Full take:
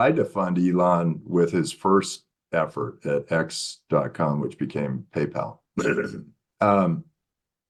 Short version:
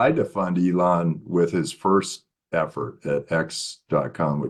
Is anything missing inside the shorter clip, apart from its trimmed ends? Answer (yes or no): no